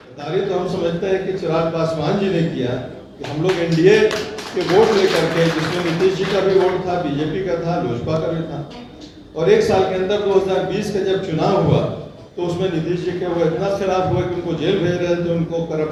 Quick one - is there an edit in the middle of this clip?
no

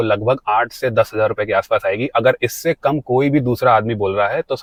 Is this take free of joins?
yes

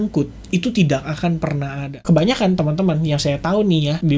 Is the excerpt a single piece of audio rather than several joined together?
no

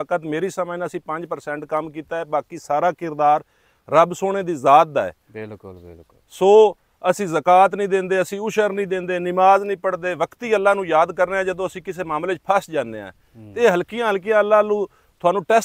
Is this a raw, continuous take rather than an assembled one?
yes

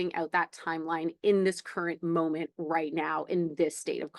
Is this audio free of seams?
yes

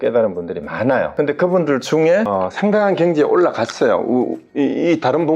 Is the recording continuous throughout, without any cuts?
no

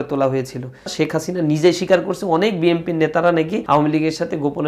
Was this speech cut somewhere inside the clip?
yes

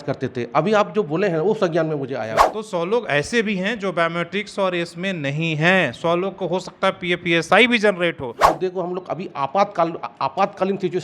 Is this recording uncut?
no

